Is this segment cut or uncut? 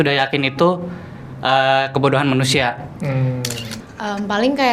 cut